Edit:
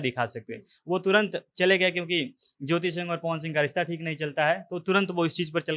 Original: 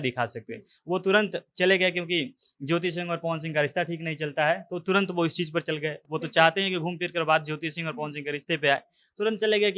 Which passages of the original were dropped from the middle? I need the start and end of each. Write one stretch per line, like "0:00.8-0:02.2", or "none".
none